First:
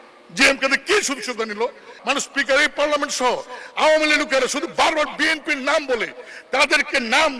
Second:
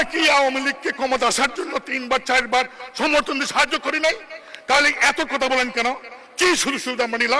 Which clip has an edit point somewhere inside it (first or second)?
first